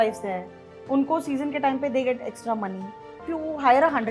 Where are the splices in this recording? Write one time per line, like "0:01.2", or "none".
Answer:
0:03.2